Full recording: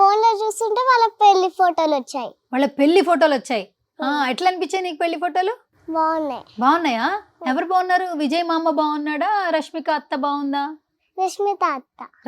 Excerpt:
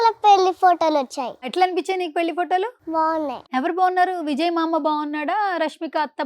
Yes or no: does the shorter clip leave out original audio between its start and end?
yes